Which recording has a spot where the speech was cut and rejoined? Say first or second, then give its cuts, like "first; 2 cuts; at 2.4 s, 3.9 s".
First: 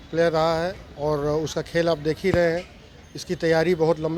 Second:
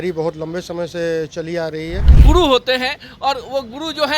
second; 1 cut; at 2.2 s